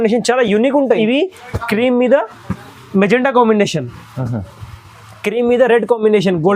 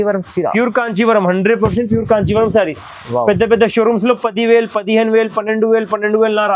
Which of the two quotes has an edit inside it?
first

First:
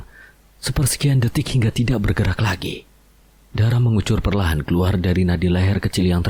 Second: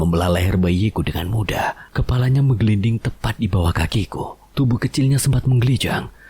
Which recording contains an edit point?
second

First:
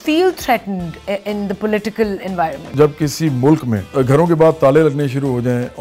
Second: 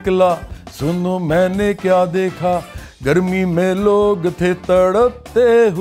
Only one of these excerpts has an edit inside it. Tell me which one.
first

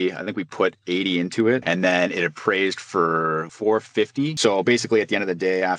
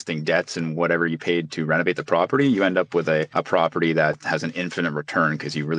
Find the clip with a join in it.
first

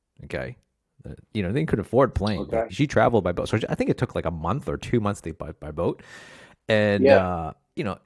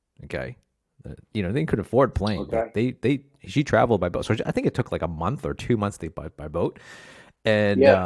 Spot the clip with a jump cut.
first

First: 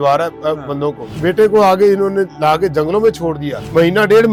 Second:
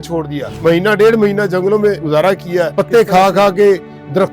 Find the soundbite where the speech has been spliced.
second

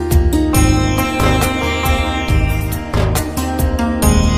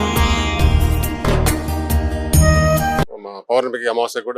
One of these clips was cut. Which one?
second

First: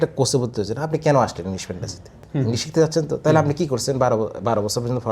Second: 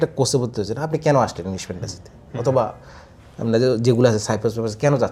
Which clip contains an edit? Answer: first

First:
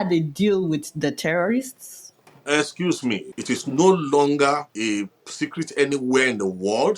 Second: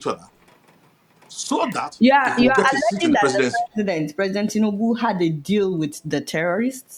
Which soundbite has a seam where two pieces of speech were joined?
first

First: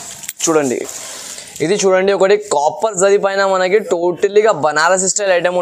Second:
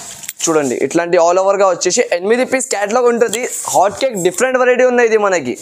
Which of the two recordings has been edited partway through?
first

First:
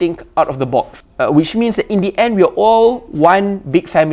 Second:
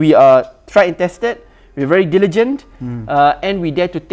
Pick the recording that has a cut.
first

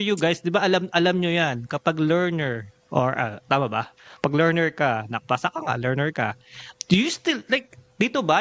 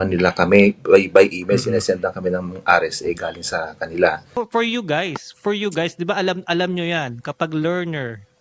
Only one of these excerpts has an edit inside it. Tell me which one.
second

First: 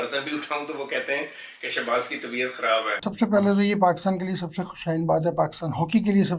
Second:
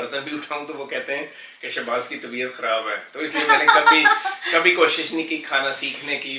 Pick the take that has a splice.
first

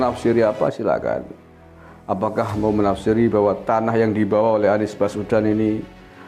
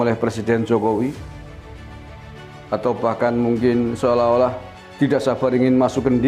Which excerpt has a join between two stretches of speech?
second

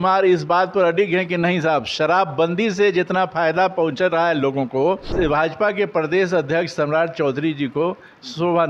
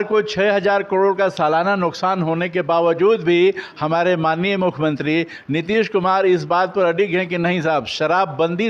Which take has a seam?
first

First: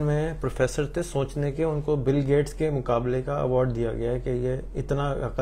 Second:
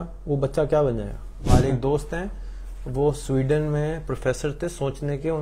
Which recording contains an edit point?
second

